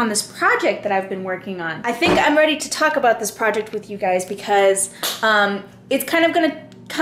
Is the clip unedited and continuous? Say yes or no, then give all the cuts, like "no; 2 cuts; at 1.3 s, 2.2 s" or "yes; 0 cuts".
yes; 0 cuts